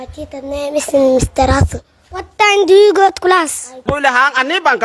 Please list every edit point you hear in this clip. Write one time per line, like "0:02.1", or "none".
0:03.8